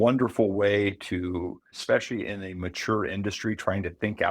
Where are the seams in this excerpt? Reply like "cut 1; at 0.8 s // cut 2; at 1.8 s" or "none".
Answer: cut 1; at 1.8 s